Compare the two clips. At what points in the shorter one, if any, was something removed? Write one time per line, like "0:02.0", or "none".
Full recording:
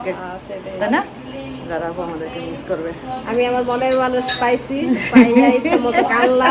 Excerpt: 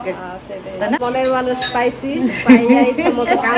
0:01.0